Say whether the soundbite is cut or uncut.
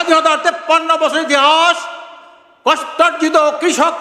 uncut